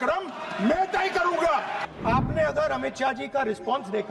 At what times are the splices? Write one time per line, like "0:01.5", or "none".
0:01.8

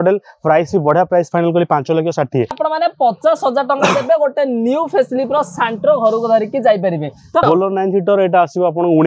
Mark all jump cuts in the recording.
0:02.6
0:07.4

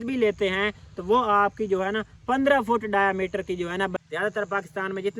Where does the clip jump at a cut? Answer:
0:03.9

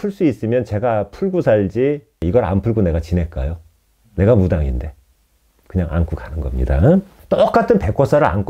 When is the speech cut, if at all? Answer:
0:02.2
0:07.2

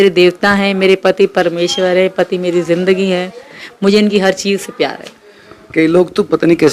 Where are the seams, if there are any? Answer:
none

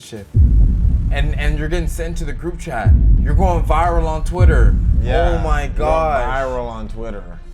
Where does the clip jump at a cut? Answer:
none

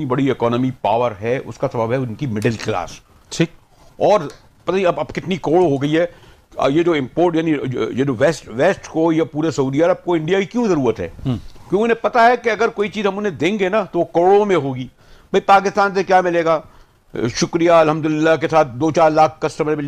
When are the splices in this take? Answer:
none

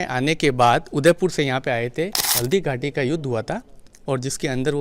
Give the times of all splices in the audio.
0:02.3

